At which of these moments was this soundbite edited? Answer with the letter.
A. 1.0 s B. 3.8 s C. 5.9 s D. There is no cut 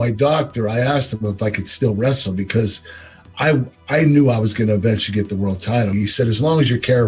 C